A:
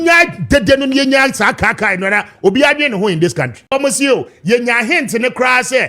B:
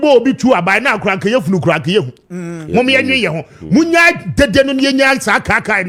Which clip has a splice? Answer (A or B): A